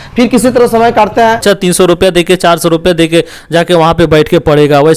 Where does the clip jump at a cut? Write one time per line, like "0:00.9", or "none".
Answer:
0:01.4

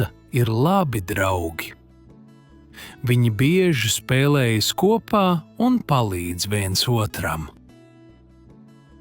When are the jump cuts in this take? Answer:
0:07.5

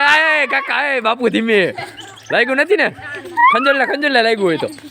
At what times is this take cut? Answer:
none

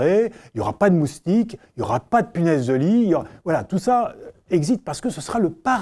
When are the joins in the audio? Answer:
none

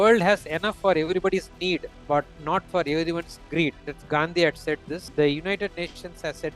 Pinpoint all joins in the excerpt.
0:05.1

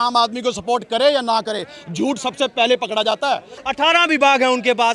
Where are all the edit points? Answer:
0:03.6

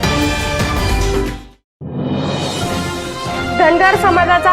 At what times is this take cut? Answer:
none

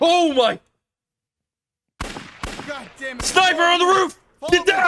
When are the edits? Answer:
none

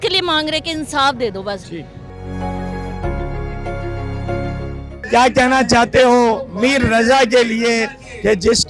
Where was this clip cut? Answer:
none

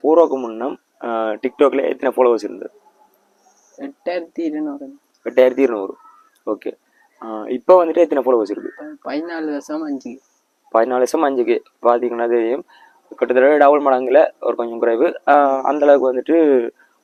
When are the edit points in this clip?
none

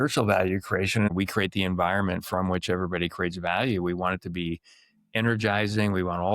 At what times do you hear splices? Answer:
0:01.1

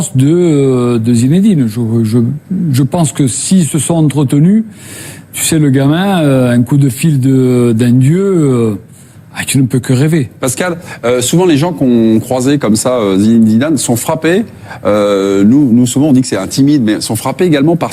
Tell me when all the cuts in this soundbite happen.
0:09.6

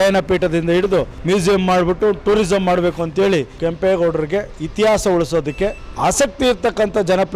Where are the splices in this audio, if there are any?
0:01.1
0:03.5
0:05.8

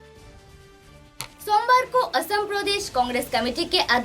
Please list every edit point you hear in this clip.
0:01.1

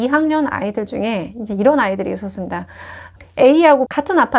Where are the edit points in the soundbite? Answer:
0:03.1

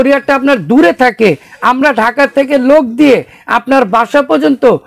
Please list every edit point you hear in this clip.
none

